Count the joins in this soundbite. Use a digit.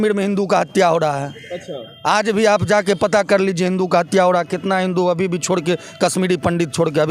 0